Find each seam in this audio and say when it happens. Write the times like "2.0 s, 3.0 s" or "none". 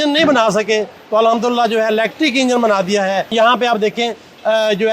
3.3 s